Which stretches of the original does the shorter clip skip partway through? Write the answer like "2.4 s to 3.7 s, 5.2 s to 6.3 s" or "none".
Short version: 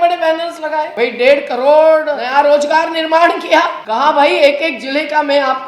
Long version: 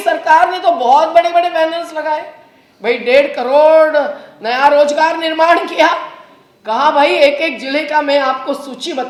2.2 s to 2.8 s, 4.0 s to 4.4 s, 6.1 s to 6.6 s

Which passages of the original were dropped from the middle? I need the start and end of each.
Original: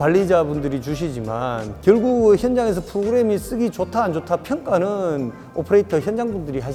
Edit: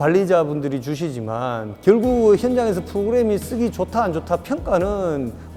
none

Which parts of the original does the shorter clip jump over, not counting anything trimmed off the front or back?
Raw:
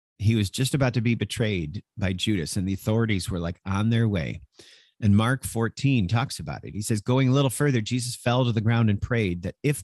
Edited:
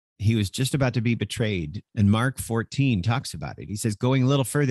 1.8 s to 4.8 s

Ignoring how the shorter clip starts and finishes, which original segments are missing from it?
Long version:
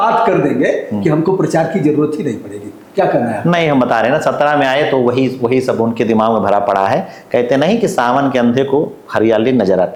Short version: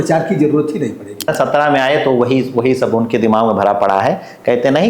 2.8 s to 4.2 s

